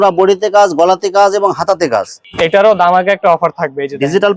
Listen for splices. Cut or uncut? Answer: cut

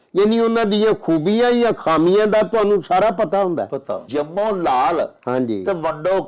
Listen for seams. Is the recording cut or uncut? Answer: cut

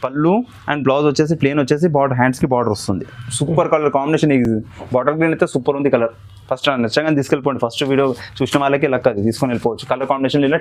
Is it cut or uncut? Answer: uncut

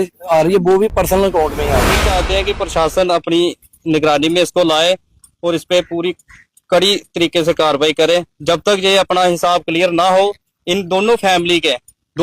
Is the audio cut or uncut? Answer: cut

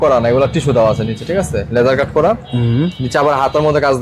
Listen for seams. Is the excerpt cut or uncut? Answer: uncut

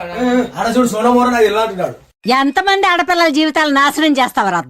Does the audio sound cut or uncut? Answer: uncut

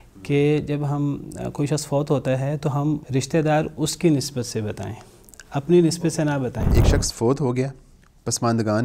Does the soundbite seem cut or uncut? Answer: cut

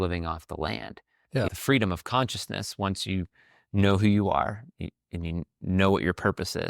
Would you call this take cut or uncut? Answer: cut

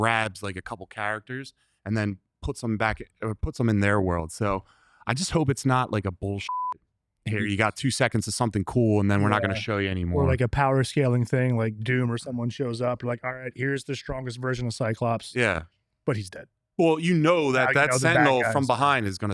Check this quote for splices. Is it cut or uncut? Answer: uncut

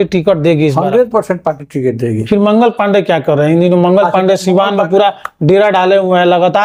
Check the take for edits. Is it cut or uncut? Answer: uncut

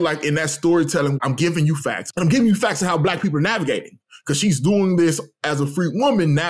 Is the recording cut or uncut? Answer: cut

